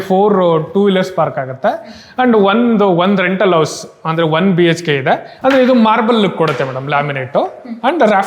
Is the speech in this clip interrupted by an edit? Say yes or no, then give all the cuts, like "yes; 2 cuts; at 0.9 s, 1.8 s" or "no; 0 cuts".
yes; 1 cut; at 5.3 s